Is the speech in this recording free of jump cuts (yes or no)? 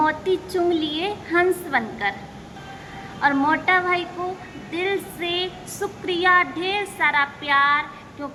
yes